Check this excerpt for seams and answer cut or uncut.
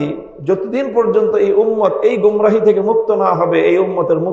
uncut